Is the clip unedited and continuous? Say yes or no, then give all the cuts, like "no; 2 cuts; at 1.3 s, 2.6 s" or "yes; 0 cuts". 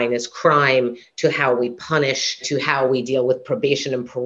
no; 1 cut; at 2.4 s